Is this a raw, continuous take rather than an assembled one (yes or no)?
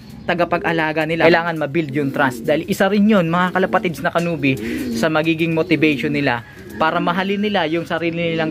no